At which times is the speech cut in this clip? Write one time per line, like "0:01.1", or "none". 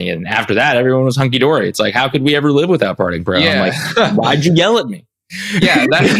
none